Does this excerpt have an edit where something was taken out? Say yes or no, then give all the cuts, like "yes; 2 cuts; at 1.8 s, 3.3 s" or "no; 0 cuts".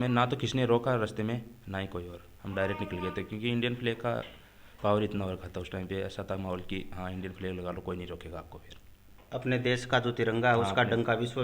no; 0 cuts